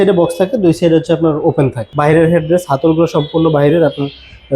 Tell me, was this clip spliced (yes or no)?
yes